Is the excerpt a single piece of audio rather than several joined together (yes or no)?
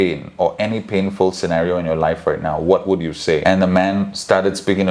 no